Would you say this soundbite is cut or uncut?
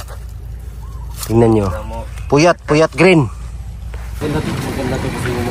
cut